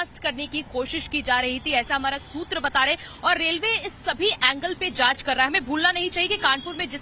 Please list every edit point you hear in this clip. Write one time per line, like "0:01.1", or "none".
0:03.9